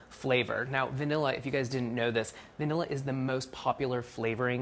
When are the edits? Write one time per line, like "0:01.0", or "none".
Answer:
none

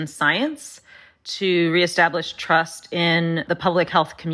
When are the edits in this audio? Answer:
0:03.4

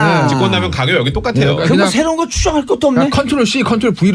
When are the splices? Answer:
0:01.4

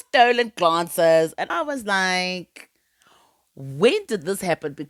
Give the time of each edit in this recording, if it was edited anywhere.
none

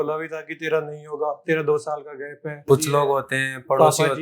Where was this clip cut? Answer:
0:02.6

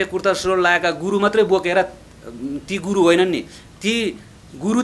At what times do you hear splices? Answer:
none

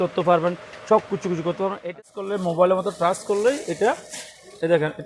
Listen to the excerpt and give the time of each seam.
0:02.1

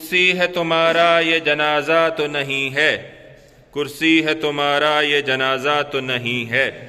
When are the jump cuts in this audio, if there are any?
none

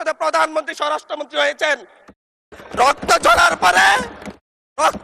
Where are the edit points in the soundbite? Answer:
none

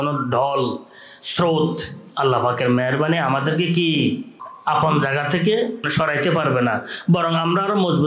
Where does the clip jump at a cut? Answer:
0:04.5
0:05.9

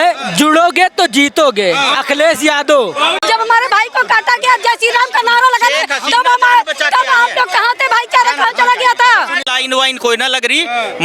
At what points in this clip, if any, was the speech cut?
0:03.2
0:09.4

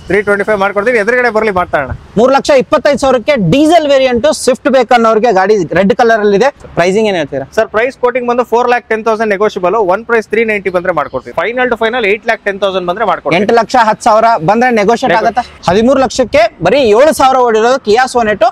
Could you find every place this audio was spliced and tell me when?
0:06.6
0:11.3
0:15.5

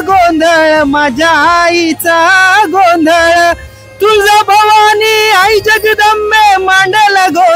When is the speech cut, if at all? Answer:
none

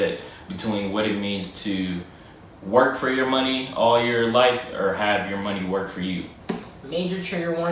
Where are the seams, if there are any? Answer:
0:06.3

